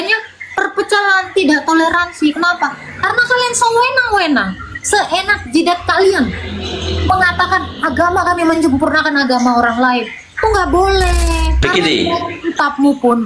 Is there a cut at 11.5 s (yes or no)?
yes